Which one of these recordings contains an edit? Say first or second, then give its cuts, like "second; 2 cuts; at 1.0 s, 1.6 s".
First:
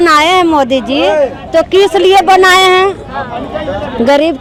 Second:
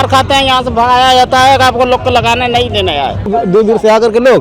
second; 1 cut; at 3.3 s